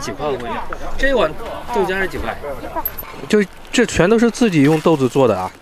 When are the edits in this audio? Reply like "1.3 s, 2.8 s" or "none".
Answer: 2.9 s